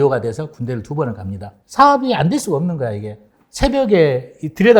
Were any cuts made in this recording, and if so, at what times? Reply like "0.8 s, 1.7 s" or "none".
1.6 s